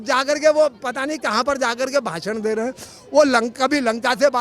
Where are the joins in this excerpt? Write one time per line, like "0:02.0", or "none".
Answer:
none